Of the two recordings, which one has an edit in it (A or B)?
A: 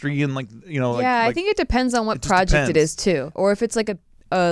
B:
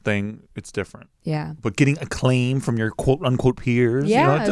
A